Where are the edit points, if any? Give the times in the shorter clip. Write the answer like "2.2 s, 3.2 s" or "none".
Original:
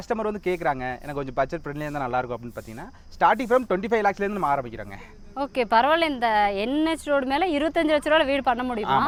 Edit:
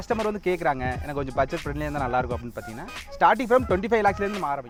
none